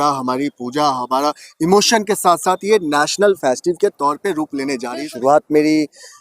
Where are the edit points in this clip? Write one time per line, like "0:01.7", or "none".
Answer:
0:04.9